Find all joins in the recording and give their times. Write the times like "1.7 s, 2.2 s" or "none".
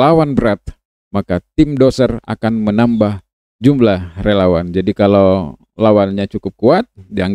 3.3 s